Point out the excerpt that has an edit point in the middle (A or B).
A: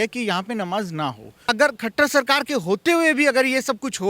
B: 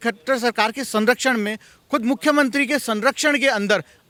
A